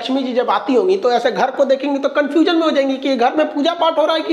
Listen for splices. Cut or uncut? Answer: uncut